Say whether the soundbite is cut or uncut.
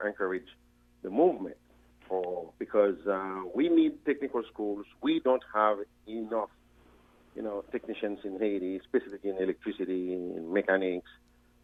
uncut